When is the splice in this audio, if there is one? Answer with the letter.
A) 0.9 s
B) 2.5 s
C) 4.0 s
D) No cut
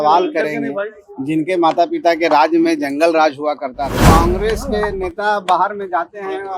C